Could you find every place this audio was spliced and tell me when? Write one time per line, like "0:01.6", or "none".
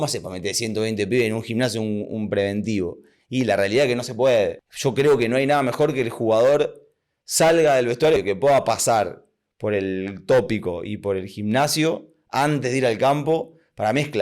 0:04.7
0:08.2